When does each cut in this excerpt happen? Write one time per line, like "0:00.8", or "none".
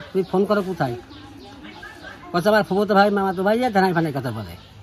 none